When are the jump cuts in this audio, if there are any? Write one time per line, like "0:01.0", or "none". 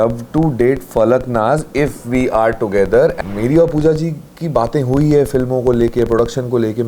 0:03.2

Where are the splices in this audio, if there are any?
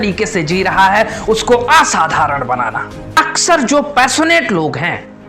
0:03.1

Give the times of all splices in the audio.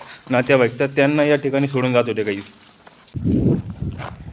0:03.2

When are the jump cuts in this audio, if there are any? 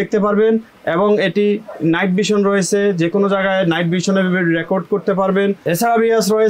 0:05.6

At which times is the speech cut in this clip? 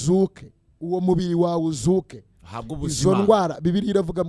none

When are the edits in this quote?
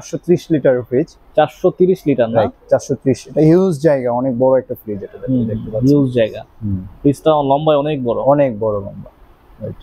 none

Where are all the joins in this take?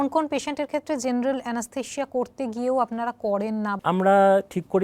0:03.7

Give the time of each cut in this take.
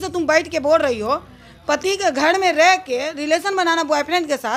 none

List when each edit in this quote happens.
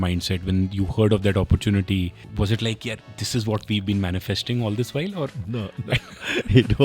0:02.3

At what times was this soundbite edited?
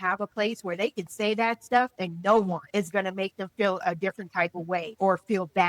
0:02.0
0:02.6
0:04.9

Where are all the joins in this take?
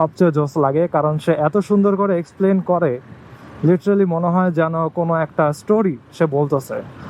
none

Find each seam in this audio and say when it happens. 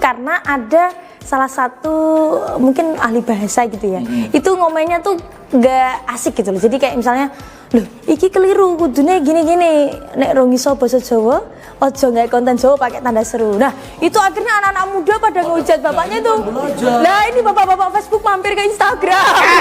none

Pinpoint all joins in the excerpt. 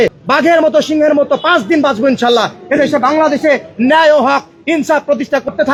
none

